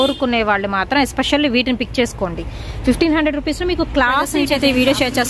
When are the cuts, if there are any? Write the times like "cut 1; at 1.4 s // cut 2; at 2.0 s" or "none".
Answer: cut 1; at 4.3 s